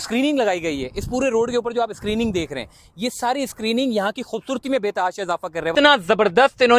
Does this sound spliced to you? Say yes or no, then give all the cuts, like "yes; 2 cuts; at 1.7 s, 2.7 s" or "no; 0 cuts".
yes; 1 cut; at 5.7 s